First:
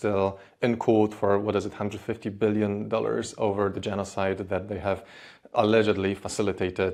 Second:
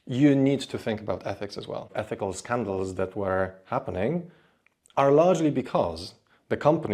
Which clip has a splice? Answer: second; 1 cut; at 1.9 s

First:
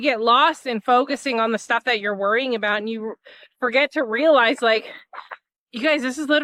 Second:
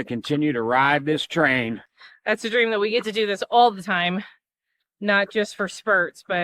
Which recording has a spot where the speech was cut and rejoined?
second; 1 cut; at 1.8 s

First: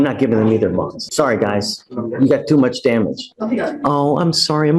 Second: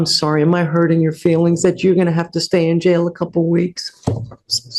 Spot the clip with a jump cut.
first; 2 cuts; at 1.0 s, 3.3 s

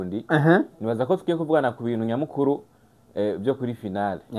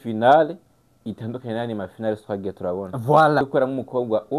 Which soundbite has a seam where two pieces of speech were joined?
second; 1 cut; at 3.5 s

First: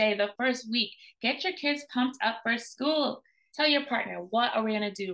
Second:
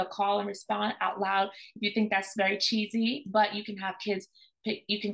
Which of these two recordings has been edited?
first; 1 cut; at 3.4 s

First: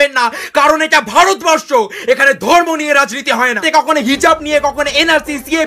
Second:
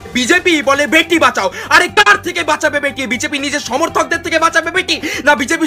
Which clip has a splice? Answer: first; 1 cut; at 3.6 s

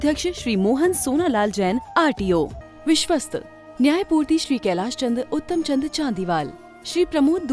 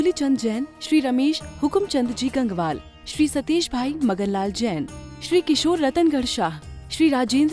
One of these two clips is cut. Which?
first; 1 cut; at 2.6 s

